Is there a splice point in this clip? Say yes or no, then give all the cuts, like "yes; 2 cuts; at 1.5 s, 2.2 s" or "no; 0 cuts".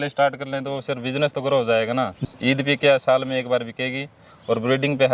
yes; 1 cut; at 2.2 s